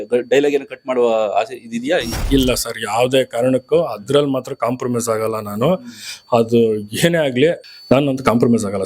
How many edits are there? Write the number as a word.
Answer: one